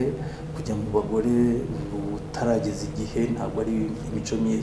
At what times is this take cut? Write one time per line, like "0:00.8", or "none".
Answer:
none